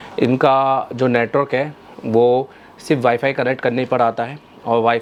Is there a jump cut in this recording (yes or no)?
no